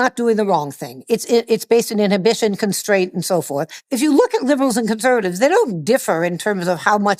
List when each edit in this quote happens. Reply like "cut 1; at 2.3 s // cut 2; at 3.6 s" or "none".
cut 1; at 3.8 s